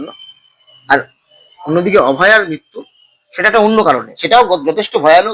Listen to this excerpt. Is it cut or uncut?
uncut